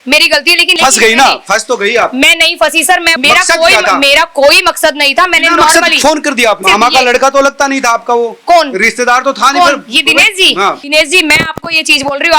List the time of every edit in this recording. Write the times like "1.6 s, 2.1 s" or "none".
0.7 s, 3.1 s, 6.6 s, 10.8 s